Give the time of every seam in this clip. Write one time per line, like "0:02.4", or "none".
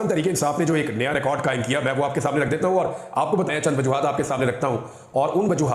0:03.5